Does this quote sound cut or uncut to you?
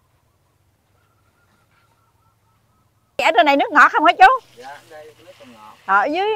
cut